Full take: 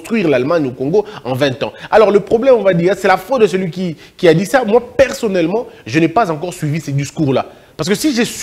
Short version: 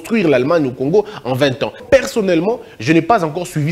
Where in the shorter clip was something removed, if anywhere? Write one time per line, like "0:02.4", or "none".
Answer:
0:01.8